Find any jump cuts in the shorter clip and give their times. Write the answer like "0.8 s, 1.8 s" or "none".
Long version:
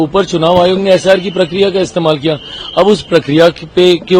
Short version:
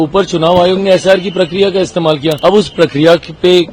2.4 s